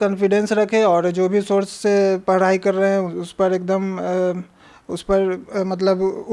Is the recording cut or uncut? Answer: uncut